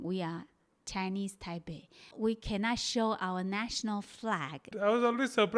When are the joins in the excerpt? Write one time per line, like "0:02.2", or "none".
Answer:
0:02.1
0:04.7